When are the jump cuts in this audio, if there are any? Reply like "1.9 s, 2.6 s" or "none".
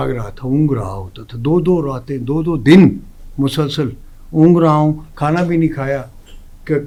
none